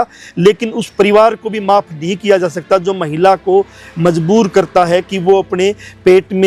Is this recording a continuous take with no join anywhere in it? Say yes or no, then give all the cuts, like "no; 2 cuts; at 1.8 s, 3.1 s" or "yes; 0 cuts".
yes; 0 cuts